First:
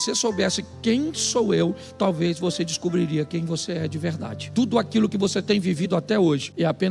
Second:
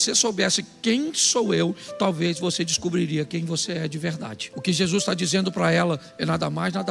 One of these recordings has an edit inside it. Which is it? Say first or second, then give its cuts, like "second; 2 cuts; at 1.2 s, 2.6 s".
first; 1 cut; at 4.3 s